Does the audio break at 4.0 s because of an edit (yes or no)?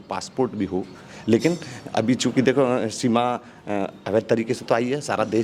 no